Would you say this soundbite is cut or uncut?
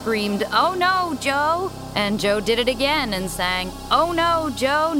cut